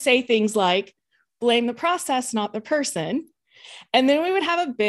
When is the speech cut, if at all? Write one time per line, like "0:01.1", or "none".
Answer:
none